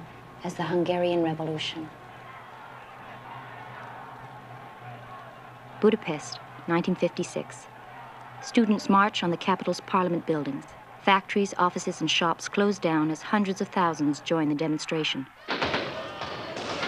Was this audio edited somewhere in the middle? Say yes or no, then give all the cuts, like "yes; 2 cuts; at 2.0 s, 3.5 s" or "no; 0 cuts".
yes; 1 cut; at 11.6 s